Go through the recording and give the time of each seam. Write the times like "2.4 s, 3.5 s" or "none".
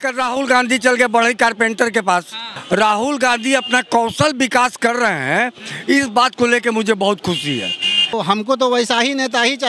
2.5 s, 8.1 s